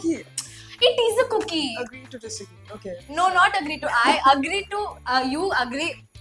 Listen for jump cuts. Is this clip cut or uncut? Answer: uncut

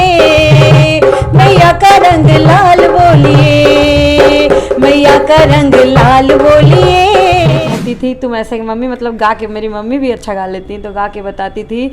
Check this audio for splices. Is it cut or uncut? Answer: cut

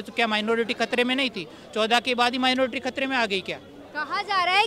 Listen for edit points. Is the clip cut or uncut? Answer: uncut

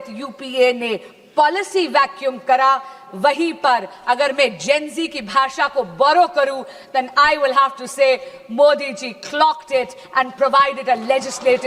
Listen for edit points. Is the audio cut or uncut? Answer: uncut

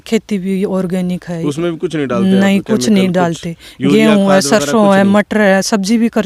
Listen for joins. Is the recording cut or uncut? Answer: uncut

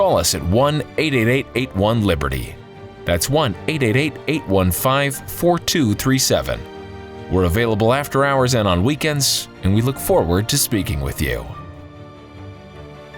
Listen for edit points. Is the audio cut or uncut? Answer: cut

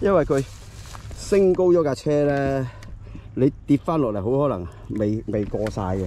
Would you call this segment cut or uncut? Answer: uncut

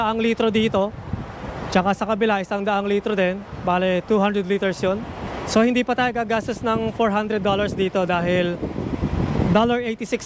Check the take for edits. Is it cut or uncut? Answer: cut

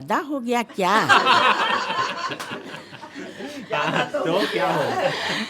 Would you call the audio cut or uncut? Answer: uncut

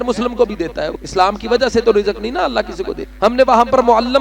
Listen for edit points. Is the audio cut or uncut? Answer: cut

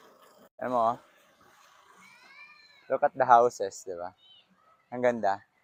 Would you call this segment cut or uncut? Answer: uncut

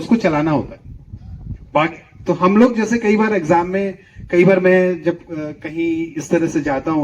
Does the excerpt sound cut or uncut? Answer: uncut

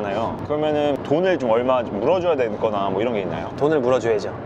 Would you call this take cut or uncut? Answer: cut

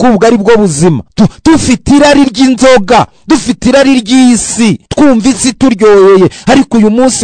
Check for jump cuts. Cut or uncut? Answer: cut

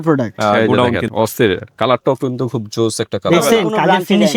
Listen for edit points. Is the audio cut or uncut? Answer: uncut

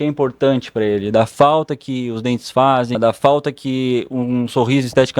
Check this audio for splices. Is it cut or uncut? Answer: cut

